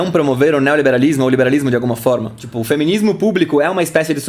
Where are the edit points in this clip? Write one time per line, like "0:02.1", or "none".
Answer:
0:02.6